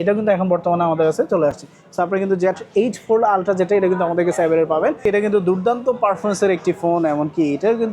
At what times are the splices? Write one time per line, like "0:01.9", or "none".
0:05.0